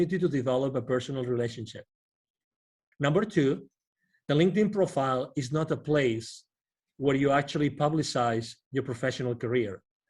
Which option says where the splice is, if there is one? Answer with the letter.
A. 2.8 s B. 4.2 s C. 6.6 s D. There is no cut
A